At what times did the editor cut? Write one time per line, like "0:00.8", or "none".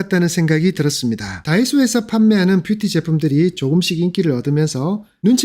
0:01.3